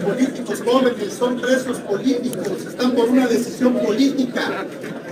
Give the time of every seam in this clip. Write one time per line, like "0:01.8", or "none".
none